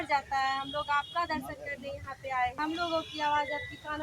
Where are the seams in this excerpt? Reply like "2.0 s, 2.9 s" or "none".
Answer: 2.6 s